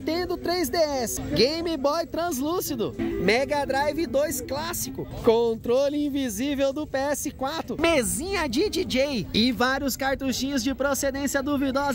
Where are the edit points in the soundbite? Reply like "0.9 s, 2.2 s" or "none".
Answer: none